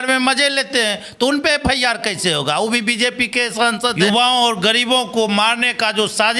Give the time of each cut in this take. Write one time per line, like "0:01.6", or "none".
0:03.9

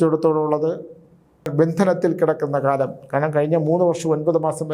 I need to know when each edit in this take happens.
0:01.4

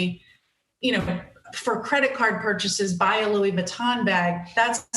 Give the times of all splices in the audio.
none

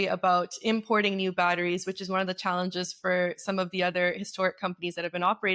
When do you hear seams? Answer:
none

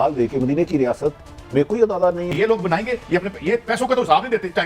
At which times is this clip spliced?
0:02.3

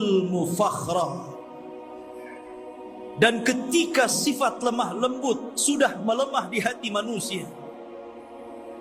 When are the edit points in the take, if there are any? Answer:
none

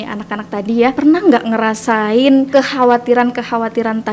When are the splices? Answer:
0:01.0
0:02.5

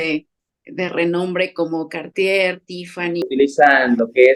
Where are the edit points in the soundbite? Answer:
0:03.2

